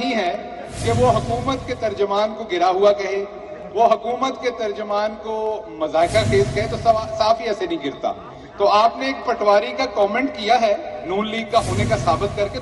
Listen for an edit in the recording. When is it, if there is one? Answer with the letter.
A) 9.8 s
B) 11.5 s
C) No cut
A